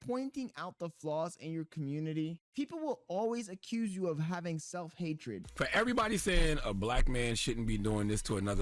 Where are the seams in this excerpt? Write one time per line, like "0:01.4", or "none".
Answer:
0:02.4
0:05.4